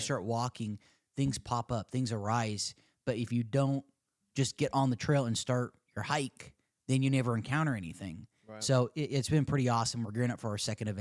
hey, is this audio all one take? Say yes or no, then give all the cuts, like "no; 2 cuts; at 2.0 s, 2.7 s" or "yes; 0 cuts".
yes; 0 cuts